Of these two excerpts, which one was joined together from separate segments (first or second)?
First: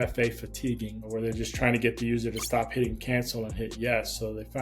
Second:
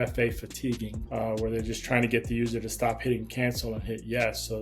first